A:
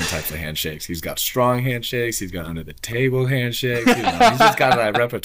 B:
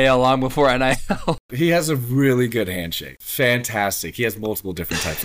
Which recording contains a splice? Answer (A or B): B